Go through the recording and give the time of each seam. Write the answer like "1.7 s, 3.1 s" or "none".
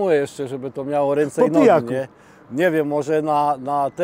none